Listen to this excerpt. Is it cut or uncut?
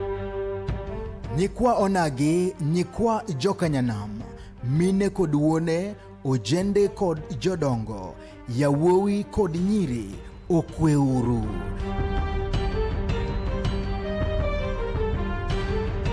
cut